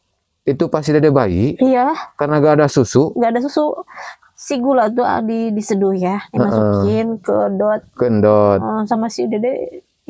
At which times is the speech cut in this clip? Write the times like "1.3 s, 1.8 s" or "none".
none